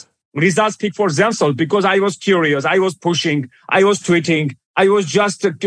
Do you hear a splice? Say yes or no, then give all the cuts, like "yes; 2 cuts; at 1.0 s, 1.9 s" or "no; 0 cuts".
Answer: yes; 1 cut; at 4.6 s